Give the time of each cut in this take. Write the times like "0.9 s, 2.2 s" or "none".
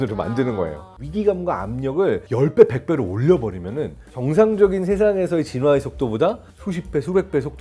1.0 s, 2.3 s, 4.2 s, 6.5 s